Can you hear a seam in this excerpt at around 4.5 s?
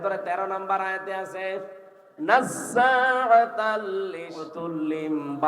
yes; 1 cut; at 4.5 s

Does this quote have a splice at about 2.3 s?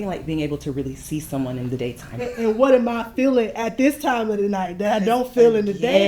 yes; 1 cut; at 2.3 s

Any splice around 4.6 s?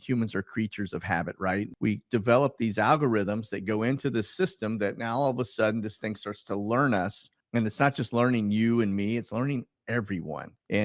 no; 2 cuts; at 1.7 s, 7.3 s

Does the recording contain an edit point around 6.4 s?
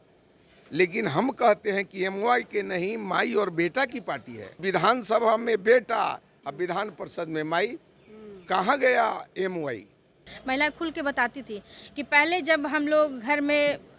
no; 2 cuts; at 4.6 s, 10.3 s

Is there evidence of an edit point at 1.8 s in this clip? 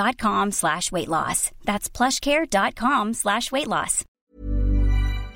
no; 1 cut; at 4.2 s

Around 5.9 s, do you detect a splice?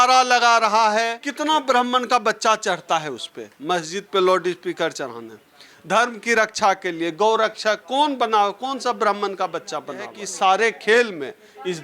no; 2 cuts; at 1.2 s, 10.2 s

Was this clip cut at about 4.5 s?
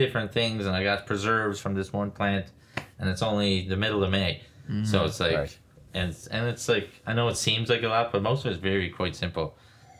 no; 0 cuts

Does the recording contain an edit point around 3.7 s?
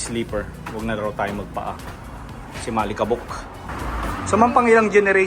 yes; 1 cut; at 3.7 s

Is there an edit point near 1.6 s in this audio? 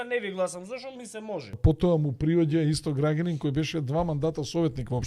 yes; 1 cut; at 1.6 s

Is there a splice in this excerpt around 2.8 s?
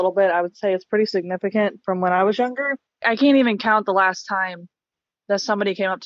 yes; 1 cut; at 2.8 s

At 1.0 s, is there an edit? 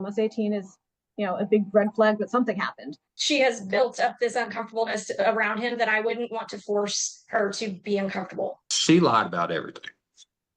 no; 2 cuts; at 3.1 s, 8.7 s

